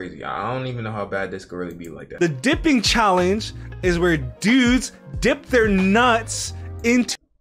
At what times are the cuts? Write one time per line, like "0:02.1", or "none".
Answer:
0:02.1